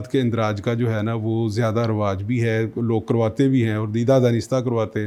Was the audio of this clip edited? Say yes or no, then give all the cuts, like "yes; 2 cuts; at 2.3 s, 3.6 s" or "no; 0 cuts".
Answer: no; 0 cuts